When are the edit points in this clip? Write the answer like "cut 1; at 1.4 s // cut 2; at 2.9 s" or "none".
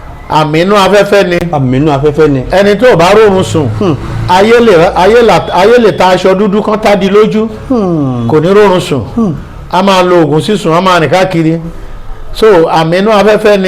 none